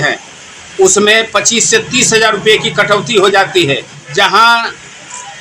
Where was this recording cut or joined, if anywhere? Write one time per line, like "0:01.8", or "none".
0:04.0